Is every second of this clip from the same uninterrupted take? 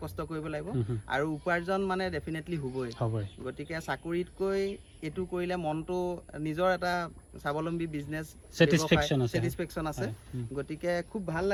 yes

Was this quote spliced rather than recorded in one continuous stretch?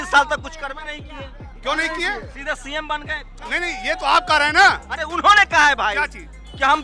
yes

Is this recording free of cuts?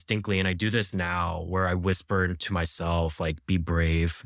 yes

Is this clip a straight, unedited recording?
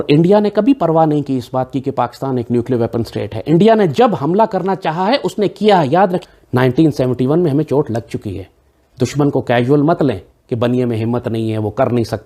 yes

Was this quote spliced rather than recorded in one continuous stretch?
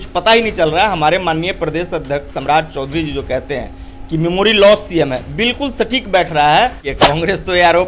yes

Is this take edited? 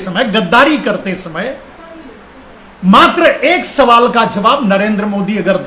no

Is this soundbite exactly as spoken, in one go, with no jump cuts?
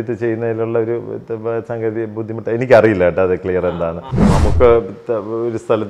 no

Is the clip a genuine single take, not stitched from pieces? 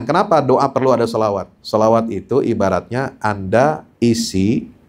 no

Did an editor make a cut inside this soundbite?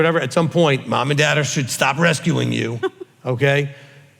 no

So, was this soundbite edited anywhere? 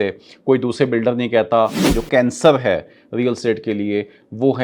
yes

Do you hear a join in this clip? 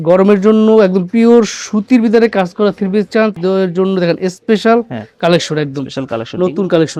no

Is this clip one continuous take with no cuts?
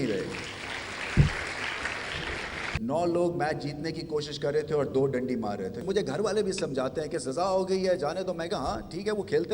no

